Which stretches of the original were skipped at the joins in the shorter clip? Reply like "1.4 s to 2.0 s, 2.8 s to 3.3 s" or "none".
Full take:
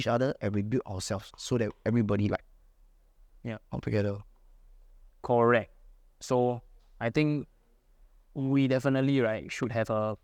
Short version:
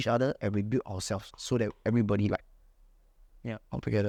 none